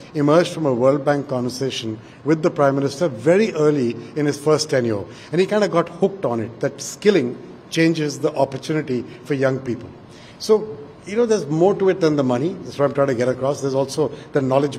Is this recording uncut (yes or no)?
yes